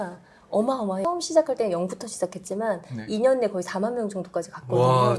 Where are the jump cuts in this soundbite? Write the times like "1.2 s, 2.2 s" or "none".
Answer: 1.0 s